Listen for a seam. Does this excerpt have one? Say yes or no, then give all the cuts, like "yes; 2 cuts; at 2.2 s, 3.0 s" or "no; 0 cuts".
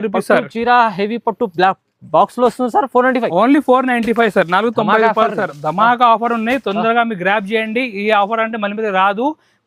no; 0 cuts